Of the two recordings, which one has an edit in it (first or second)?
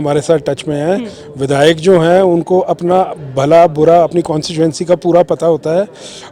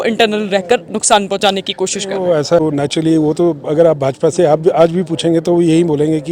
second